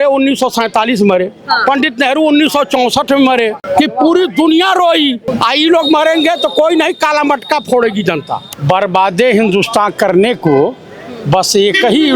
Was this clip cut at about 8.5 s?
yes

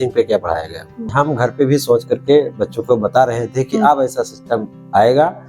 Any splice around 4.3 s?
no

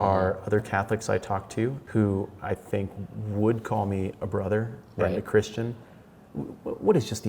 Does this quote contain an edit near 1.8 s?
yes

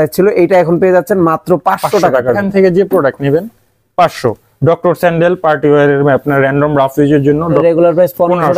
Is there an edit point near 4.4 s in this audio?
no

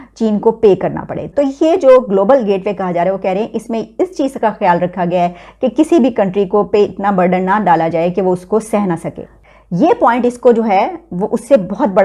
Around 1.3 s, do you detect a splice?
yes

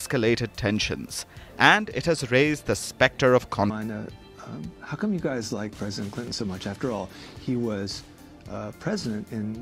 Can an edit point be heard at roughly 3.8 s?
yes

